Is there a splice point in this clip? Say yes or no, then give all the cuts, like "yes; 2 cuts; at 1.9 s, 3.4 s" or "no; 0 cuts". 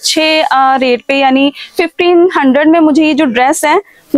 no; 0 cuts